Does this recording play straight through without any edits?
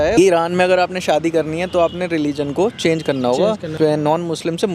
no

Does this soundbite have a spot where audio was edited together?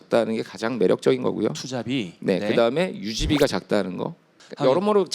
yes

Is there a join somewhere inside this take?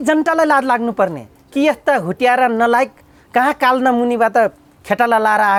no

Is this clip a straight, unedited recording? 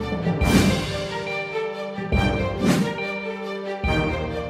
yes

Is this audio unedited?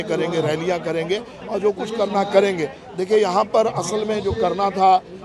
yes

